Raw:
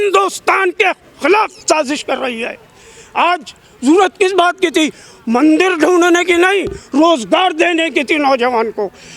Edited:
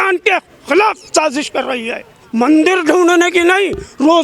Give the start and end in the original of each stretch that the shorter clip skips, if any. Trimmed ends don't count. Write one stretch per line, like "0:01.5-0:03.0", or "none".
0:02.7-0:05.1